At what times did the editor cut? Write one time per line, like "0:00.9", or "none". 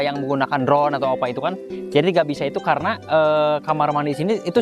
none